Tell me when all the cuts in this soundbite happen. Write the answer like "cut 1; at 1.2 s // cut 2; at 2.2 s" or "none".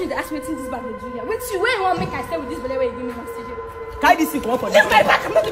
cut 1; at 3.8 s